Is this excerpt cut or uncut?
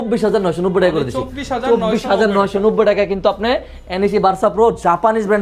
uncut